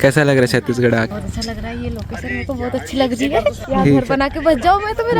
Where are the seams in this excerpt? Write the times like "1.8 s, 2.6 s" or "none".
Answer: 1.1 s, 3.6 s